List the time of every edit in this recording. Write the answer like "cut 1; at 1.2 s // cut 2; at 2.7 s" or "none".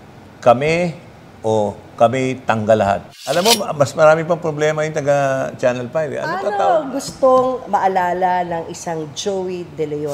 cut 1; at 3.1 s // cut 2; at 6.5 s